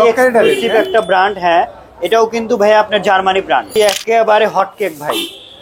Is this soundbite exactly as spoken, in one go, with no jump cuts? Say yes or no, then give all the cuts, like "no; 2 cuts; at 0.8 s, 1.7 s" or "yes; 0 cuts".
no; 1 cut; at 3.7 s